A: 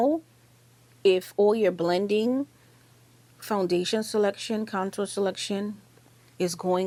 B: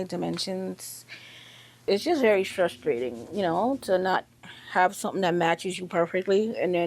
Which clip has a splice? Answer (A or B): B